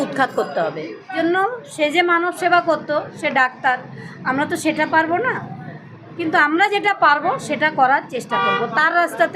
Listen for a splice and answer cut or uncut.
cut